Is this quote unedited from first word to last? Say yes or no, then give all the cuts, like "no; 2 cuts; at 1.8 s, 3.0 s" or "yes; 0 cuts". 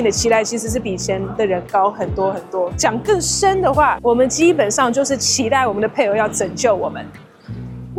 yes; 0 cuts